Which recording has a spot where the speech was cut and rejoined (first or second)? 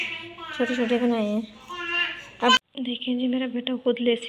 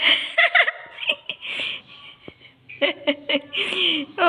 first